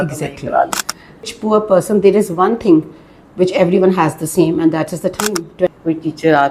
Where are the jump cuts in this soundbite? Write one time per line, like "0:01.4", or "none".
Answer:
0:01.3
0:05.7